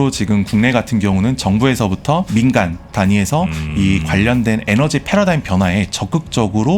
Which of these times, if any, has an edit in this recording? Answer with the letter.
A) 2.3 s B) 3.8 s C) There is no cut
A